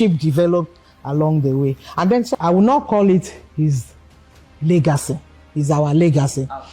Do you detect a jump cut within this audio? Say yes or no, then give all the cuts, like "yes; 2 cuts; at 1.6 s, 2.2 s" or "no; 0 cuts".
yes; 1 cut; at 2.4 s